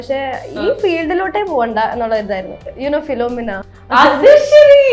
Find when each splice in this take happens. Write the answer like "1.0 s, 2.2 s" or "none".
2.7 s, 3.7 s